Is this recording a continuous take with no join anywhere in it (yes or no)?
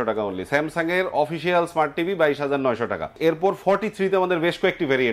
no